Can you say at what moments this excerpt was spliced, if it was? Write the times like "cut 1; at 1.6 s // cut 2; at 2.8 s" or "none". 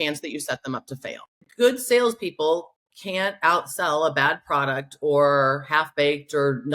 cut 1; at 1.4 s